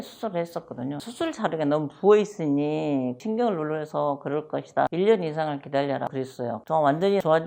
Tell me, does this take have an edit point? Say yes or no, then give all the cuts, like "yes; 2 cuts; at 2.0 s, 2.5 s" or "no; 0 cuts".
no; 0 cuts